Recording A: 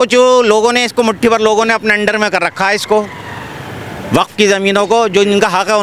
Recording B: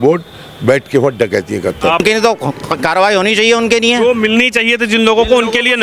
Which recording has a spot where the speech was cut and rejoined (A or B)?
B